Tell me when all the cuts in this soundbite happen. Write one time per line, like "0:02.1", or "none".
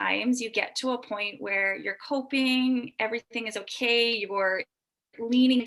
none